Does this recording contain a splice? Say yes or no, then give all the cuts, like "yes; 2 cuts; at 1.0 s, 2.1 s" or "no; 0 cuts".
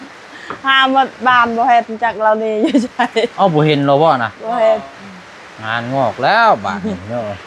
no; 0 cuts